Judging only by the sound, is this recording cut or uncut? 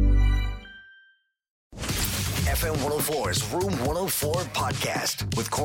cut